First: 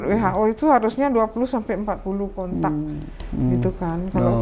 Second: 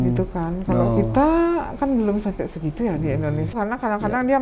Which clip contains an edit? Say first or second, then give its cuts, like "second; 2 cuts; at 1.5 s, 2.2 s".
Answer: second; 1 cut; at 3.5 s